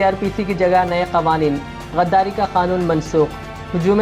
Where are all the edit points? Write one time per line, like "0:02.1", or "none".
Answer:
none

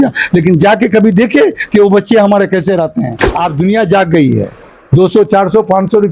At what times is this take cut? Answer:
0:03.2

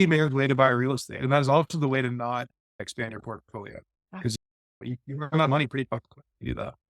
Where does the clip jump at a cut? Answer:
0:02.8

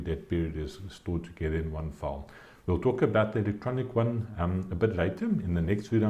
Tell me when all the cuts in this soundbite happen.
none

